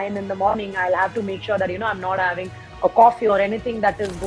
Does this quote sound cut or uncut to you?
uncut